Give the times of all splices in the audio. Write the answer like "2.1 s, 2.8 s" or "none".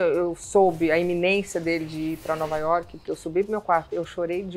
2.9 s